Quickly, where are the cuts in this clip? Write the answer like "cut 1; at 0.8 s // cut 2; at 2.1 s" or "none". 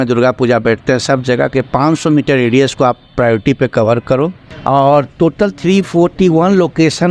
cut 1; at 4.5 s